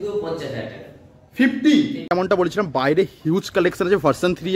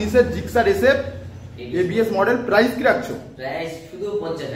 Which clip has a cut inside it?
first; 1 cut; at 2.0 s

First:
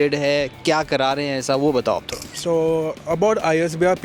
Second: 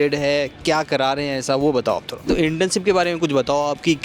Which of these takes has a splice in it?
second; 1 cut; at 2.3 s

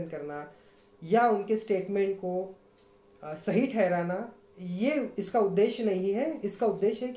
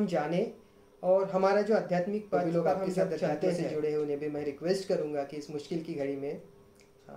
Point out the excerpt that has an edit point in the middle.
second; 1 cut; at 3.7 s

